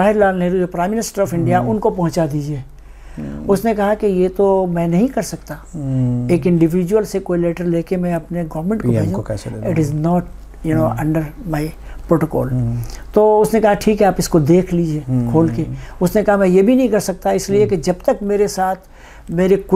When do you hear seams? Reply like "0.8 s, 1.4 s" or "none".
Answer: none